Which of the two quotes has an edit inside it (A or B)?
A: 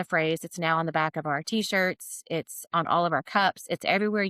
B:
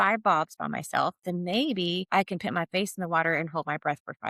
B